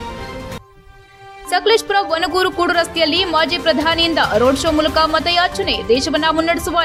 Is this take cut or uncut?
uncut